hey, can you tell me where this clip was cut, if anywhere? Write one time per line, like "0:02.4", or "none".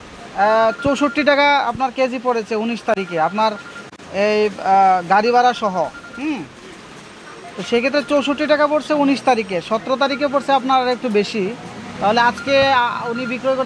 none